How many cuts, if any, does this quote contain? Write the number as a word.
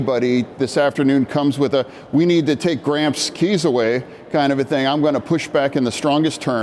zero